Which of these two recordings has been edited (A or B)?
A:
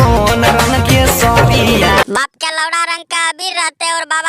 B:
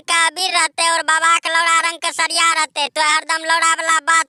A